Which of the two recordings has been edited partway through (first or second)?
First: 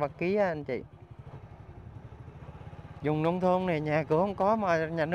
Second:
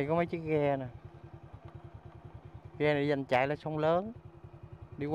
first